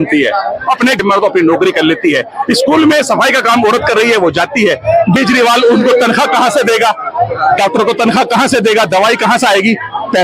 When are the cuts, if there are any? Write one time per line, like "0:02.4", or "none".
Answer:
0:01.0
0:05.2